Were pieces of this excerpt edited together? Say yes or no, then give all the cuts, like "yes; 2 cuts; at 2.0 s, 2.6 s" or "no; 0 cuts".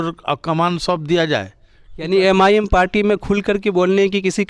no; 0 cuts